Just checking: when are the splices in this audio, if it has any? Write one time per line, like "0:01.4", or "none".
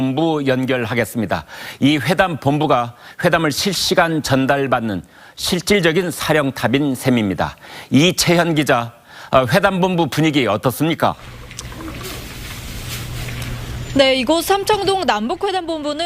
0:02.4